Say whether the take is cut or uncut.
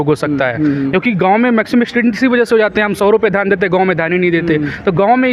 uncut